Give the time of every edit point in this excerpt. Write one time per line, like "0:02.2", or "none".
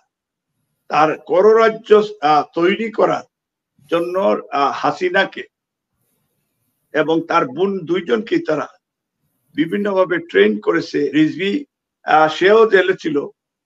0:11.1